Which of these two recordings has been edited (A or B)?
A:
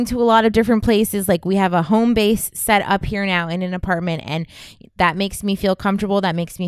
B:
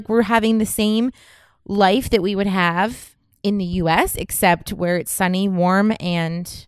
B